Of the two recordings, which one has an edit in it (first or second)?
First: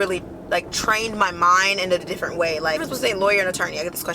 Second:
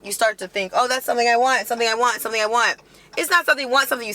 first